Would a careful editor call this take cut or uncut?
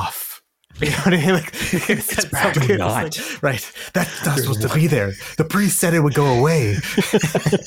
uncut